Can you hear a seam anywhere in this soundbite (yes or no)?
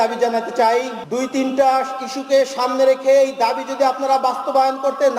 yes